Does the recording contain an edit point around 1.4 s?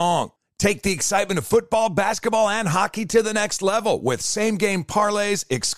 no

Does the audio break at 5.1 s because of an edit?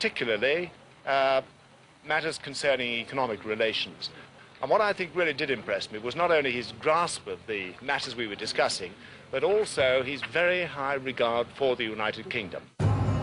yes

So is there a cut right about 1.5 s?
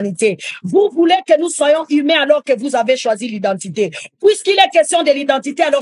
no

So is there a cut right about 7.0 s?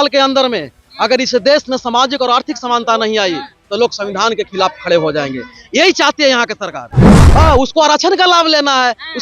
yes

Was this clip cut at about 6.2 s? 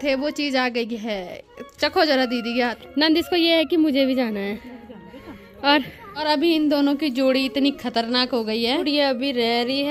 yes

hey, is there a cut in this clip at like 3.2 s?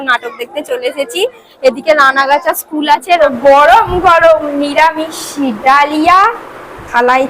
yes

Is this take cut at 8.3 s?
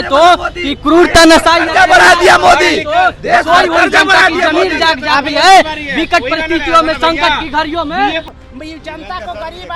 yes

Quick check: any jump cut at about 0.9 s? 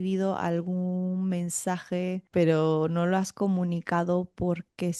no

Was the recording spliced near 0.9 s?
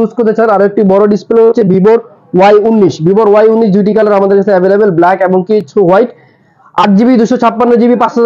no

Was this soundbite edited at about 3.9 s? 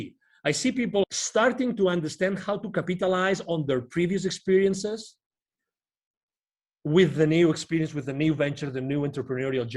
no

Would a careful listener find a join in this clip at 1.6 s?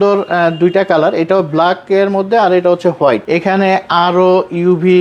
no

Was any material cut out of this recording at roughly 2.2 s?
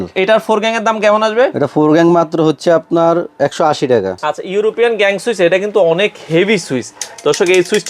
no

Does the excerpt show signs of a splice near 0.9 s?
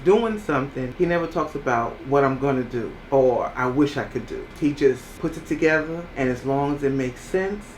yes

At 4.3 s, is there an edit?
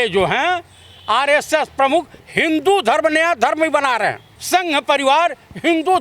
yes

